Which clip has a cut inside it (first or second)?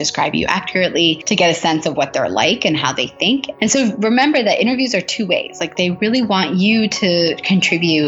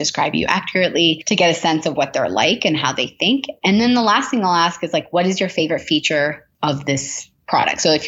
first